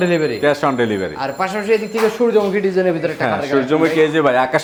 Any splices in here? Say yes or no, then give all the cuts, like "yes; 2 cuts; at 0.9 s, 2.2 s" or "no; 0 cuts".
no; 0 cuts